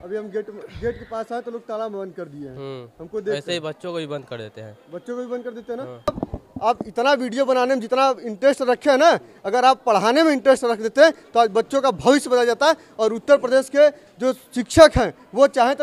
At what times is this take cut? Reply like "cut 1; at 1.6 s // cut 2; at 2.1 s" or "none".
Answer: cut 1; at 6.1 s